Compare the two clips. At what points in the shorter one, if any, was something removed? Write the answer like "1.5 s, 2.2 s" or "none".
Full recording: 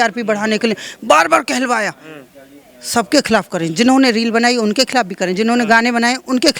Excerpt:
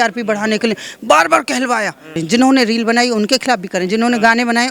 2.1 s